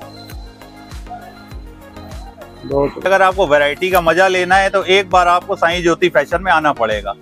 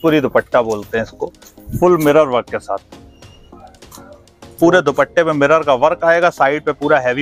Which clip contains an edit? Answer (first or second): first